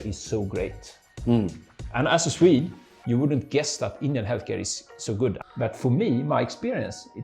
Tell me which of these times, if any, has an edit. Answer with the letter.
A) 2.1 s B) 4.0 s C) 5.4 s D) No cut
C